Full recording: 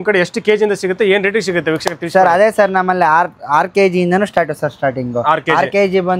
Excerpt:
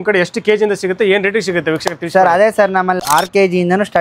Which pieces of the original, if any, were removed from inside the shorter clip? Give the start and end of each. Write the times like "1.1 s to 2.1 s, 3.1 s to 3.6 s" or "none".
3.0 s to 3.4 s